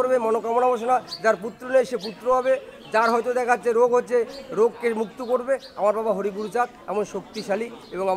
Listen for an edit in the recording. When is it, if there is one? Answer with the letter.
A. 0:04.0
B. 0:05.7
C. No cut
C